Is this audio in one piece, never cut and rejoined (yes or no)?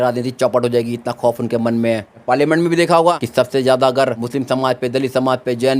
no